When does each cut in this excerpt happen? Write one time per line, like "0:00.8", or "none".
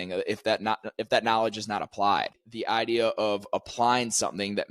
0:02.4